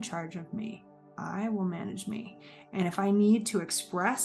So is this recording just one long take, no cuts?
yes; 0 cuts

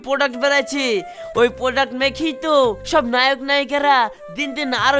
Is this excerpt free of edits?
yes; 0 cuts

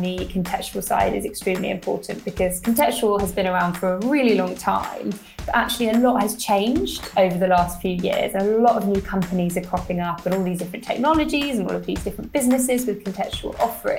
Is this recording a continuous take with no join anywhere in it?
no; 1 cut; at 7.0 s

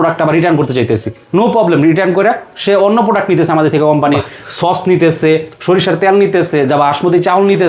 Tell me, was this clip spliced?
no; 0 cuts

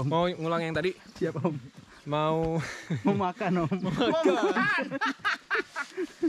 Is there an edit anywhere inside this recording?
no; 0 cuts

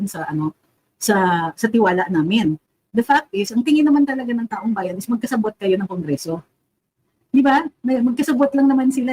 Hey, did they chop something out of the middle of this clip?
yes; 1 cut; at 7.1 s

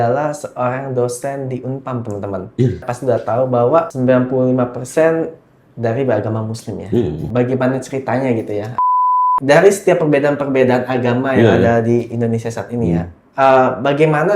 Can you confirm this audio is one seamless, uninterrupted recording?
no; 4 cuts; at 2.9 s, 3.9 s, 7.2 s, 9.1 s

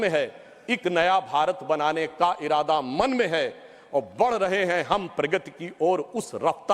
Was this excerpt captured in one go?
no; 1 cut; at 1.3 s

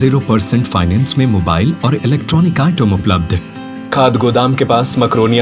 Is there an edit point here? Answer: yes; 1 cut; at 3.9 s

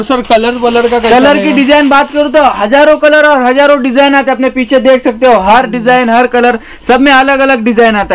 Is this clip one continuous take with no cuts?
yes; 0 cuts

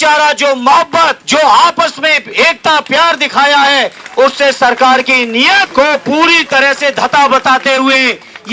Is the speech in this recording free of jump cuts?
no; 2 cuts; at 1.2 s, 5.7 s

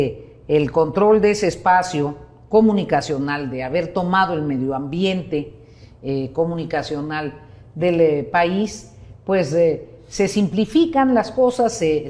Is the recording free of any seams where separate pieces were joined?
yes; 0 cuts

